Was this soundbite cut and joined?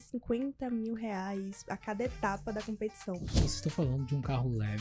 yes; 1 cut; at 3.4 s

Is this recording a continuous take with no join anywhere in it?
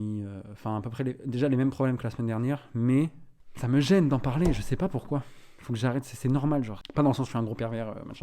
no; 2 cuts; at 3.2 s, 6.8 s

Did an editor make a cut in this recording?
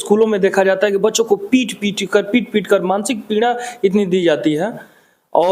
no; 0 cuts

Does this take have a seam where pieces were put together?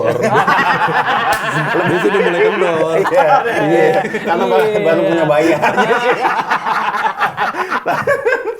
no; 0 cuts

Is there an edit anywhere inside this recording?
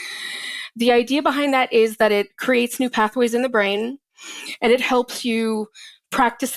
no; 0 cuts

